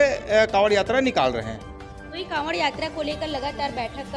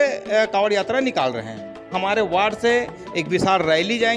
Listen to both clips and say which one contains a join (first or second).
second